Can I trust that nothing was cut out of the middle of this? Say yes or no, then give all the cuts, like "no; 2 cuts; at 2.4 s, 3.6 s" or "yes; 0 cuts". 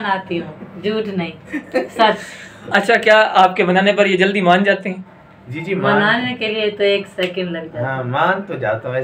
yes; 0 cuts